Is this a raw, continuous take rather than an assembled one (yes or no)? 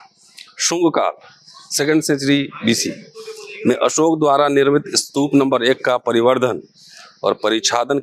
yes